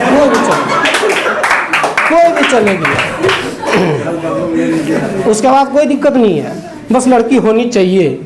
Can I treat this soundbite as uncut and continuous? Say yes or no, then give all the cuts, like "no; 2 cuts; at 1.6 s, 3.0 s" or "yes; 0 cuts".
yes; 0 cuts